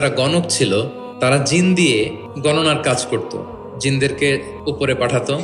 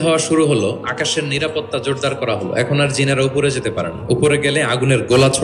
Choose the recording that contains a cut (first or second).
first